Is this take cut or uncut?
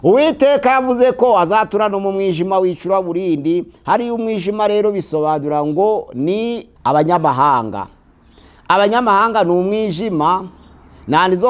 cut